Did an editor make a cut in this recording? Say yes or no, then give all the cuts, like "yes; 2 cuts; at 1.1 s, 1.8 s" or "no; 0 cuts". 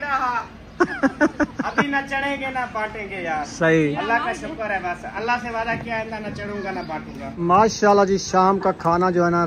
yes; 1 cut; at 7.4 s